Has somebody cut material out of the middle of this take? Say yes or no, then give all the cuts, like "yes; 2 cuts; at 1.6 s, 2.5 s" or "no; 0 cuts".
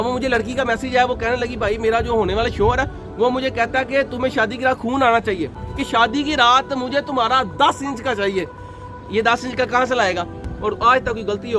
yes; 2 cuts; at 5.7 s, 10.5 s